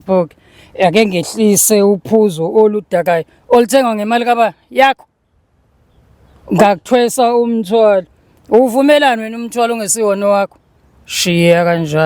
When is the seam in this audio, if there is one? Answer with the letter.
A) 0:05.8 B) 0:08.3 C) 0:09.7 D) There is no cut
D